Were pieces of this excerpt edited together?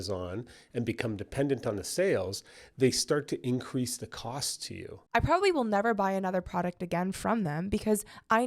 yes; 1 cut; at 4.9 s

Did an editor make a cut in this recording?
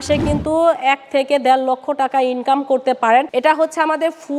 yes; 1 cut; at 3.3 s

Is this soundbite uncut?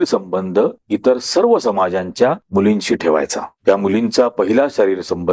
yes; 0 cuts

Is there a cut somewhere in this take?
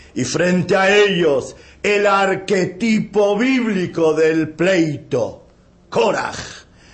yes; 1 cut; at 5.0 s

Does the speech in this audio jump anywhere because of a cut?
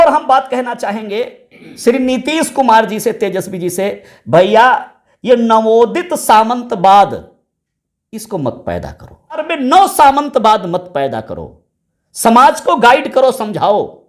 yes; 1 cut; at 9.4 s

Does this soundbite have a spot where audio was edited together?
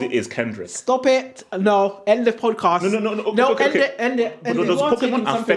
yes; 1 cut; at 4.4 s

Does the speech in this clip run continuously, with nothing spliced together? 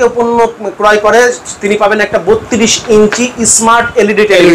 yes; 0 cuts

